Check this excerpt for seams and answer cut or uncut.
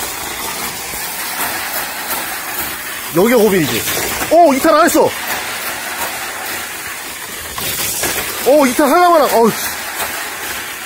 uncut